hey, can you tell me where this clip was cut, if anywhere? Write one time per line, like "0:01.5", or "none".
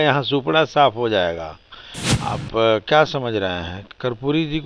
none